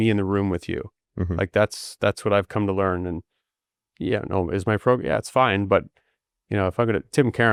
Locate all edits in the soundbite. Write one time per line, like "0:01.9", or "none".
none